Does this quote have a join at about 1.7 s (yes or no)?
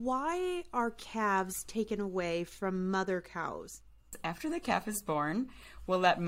no